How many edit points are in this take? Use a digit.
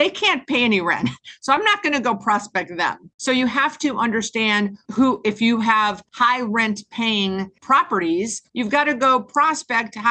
5